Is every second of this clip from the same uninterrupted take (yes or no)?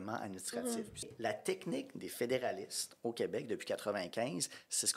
no